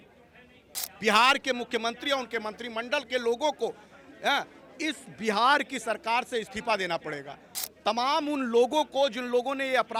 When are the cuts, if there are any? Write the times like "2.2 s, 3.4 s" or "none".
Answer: none